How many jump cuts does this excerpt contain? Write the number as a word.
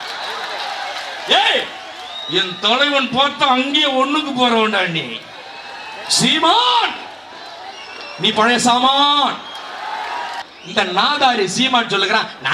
two